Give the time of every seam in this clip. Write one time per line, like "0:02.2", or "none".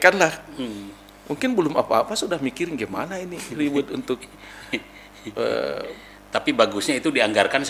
none